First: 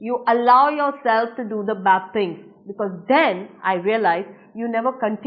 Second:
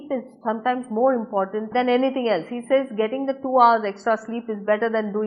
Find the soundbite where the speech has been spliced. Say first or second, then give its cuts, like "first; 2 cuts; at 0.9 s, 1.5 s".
second; 1 cut; at 1.7 s